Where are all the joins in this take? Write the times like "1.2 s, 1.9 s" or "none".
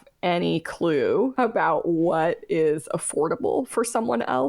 1.3 s